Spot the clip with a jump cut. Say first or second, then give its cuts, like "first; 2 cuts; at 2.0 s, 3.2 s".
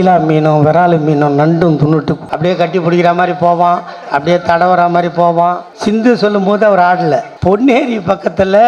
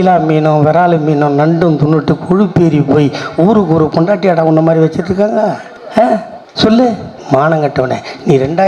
first; 3 cuts; at 2.2 s, 5.7 s, 7.3 s